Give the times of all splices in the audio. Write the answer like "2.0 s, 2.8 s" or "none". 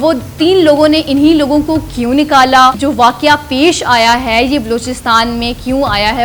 2.8 s